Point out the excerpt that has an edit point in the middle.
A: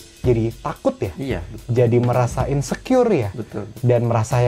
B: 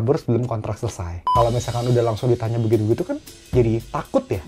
B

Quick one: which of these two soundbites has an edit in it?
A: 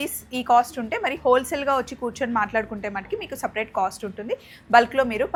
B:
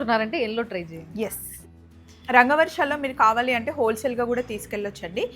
B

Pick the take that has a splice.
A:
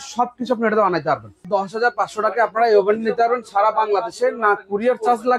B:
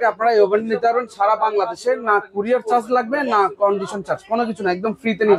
A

